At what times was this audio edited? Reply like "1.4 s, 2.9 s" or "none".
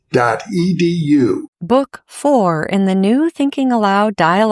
1.5 s